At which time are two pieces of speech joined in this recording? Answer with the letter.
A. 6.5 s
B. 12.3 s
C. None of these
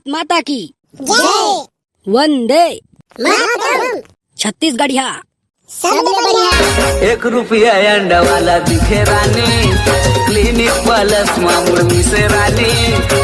A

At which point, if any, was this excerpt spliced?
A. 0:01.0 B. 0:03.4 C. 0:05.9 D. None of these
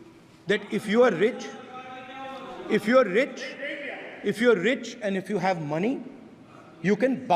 D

